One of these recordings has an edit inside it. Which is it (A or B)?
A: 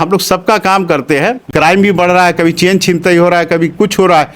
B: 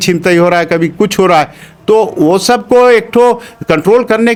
A